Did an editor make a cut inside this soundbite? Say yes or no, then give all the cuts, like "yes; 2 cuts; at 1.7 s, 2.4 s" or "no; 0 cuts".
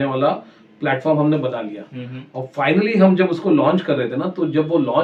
no; 0 cuts